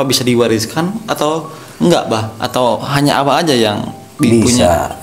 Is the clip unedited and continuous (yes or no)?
yes